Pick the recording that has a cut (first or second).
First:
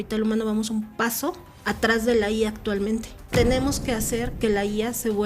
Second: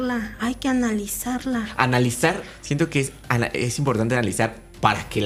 first